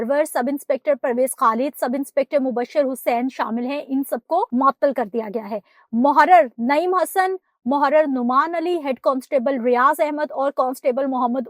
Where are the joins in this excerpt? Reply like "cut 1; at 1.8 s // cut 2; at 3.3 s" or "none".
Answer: cut 1; at 4.5 s